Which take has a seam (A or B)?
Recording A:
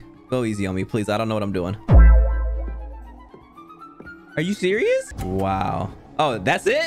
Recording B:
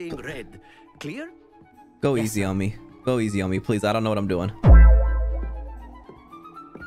A